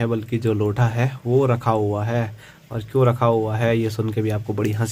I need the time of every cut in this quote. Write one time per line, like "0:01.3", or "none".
none